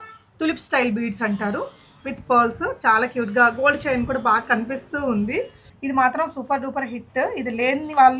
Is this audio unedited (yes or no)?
no